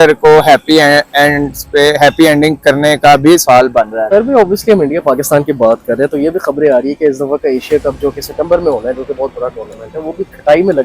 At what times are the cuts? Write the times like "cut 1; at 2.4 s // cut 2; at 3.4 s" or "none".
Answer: cut 1; at 4.1 s